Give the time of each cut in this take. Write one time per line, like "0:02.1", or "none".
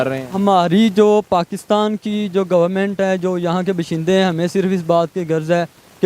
none